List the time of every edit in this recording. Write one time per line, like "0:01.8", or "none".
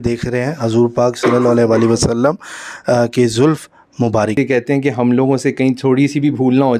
0:04.3

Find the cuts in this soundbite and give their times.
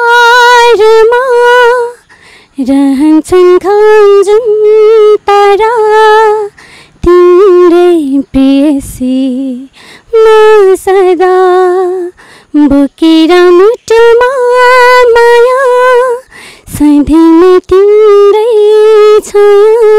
none

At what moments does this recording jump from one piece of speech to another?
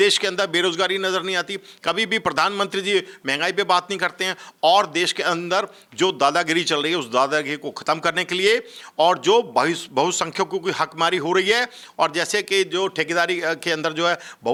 none

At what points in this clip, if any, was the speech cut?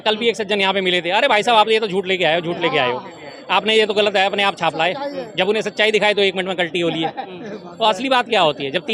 none

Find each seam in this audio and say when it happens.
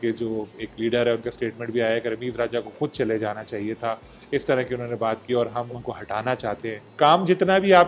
0:05.7
0:06.9

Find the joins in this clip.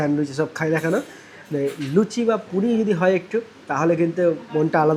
none

